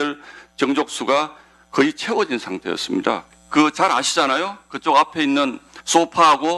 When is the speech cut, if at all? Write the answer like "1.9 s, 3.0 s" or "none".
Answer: 3.2 s